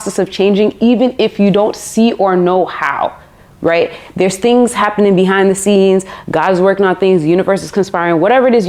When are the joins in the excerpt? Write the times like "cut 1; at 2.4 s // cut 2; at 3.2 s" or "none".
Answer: none